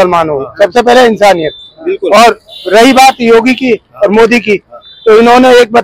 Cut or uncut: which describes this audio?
uncut